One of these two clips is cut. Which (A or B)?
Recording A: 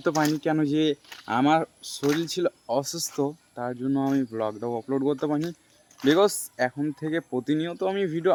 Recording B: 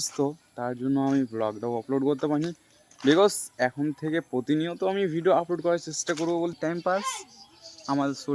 B